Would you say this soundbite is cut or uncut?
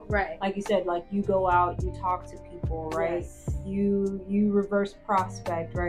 uncut